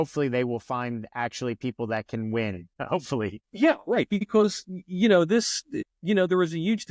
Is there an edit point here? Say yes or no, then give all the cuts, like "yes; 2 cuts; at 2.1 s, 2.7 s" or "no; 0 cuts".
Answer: yes; 3 cuts; at 3.1 s, 4.2 s, 5.6 s